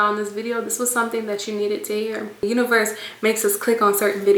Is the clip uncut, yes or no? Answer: no